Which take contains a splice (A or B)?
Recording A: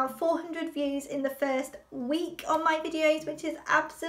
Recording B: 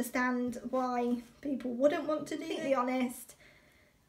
B